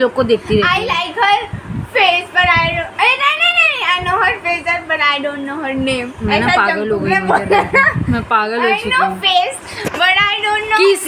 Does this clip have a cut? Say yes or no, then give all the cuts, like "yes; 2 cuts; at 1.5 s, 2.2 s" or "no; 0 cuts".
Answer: no; 0 cuts